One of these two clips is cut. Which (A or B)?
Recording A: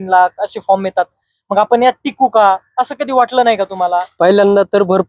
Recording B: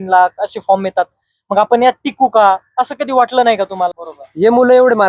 B